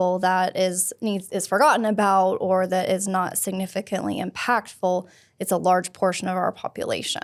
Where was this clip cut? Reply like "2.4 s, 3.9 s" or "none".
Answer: none